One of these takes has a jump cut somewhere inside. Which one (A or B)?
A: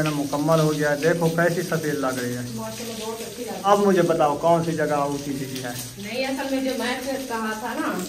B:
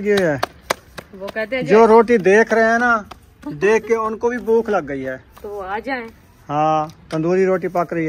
A